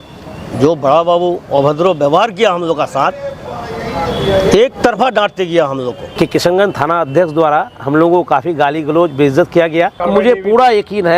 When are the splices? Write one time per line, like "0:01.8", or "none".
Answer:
0:06.0
0:10.0